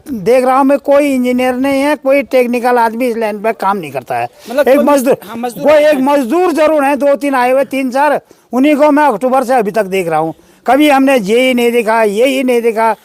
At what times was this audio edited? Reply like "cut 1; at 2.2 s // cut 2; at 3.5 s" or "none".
none